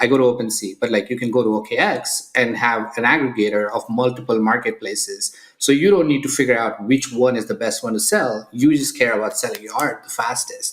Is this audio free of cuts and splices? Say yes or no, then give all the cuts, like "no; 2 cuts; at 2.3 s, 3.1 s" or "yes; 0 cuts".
yes; 0 cuts